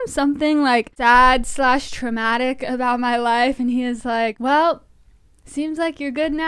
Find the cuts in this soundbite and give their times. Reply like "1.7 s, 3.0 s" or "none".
0.9 s, 4.4 s